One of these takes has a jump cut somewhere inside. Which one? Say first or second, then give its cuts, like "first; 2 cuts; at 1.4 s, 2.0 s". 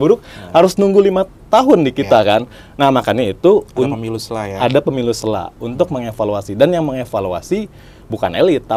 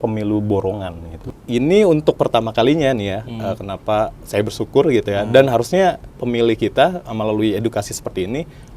second; 1 cut; at 1.3 s